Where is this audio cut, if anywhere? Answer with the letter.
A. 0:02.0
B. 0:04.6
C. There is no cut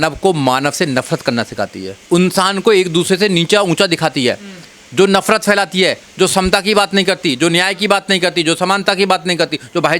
A